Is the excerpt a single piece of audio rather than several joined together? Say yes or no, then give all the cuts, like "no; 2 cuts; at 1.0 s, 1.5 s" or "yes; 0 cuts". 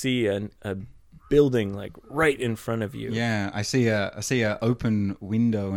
yes; 0 cuts